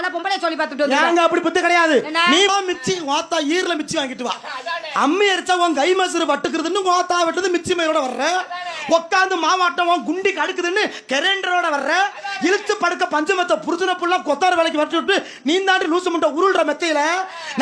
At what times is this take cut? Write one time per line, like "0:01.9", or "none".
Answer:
0:02.5